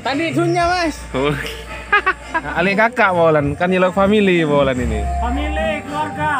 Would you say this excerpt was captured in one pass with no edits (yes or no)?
no